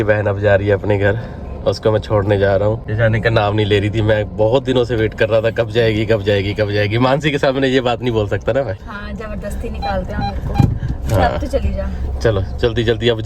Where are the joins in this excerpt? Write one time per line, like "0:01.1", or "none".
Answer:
none